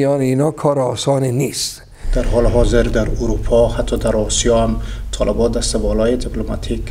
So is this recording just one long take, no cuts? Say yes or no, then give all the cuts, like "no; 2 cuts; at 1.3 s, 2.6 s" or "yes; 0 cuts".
no; 1 cut; at 2.0 s